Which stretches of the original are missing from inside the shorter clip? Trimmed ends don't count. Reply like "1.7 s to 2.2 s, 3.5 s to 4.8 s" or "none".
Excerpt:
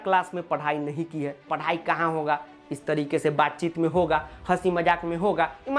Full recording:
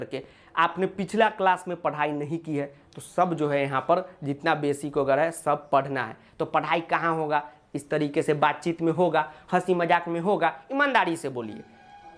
2.8 s to 6.5 s